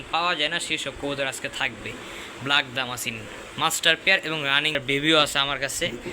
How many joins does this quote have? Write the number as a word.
one